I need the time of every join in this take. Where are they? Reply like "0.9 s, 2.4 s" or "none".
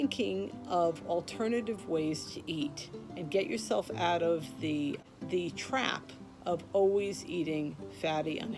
5.0 s